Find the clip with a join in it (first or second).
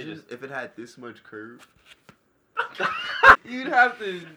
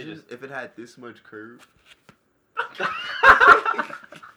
first